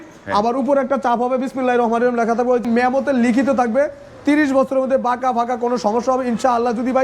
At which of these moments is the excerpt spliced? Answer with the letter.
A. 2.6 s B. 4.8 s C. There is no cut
A